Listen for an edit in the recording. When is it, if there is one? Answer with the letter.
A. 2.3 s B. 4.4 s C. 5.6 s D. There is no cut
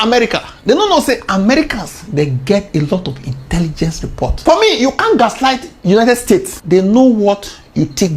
B